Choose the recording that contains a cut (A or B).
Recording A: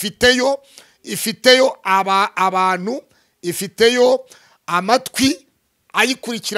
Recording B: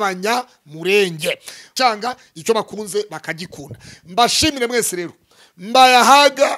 B